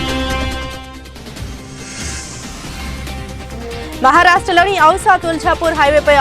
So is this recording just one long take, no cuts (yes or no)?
no